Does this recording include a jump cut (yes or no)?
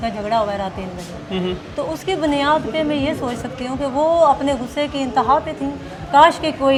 no